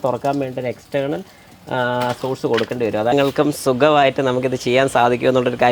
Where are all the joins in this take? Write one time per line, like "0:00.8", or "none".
0:03.1

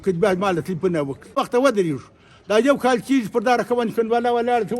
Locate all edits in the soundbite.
0:01.4

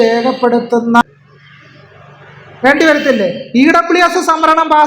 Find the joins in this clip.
0:01.0

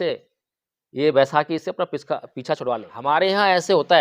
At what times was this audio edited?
0:02.9

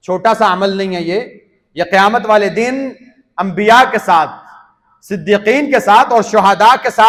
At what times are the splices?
none

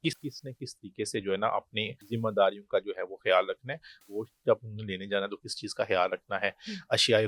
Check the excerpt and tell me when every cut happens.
0:02.0
0:04.0

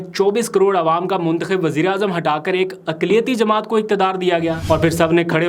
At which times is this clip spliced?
0:04.6

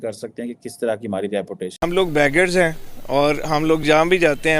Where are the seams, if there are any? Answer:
0:01.9

